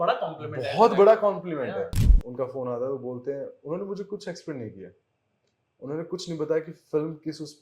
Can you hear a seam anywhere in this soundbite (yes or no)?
yes